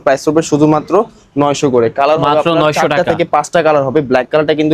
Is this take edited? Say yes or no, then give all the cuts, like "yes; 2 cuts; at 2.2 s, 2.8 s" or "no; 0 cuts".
no; 0 cuts